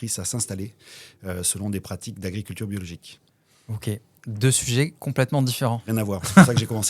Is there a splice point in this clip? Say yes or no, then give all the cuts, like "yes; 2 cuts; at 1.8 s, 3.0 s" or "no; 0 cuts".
no; 0 cuts